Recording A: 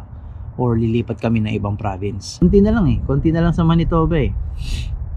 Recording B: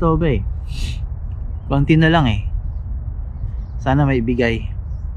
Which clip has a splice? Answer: A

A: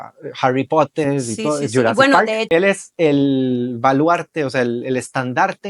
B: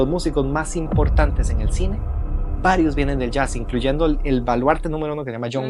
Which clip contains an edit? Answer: A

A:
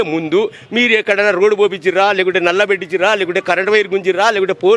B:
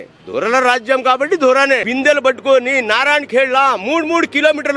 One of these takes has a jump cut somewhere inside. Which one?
B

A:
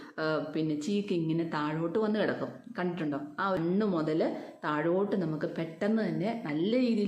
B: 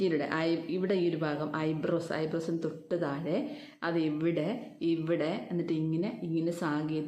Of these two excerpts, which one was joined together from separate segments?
A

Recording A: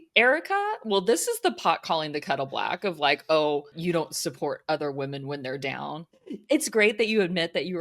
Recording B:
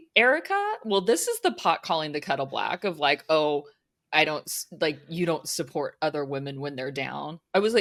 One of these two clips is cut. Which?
A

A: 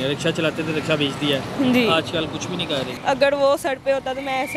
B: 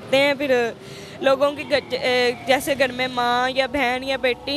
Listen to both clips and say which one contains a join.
A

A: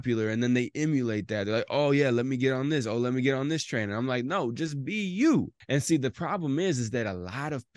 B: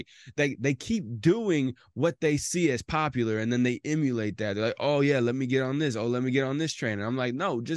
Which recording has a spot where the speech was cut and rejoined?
A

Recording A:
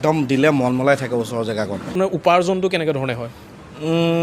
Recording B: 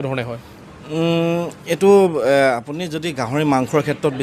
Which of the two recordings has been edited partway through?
A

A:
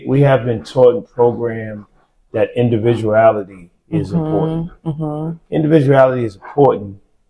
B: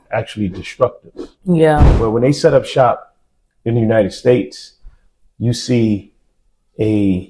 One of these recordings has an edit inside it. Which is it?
B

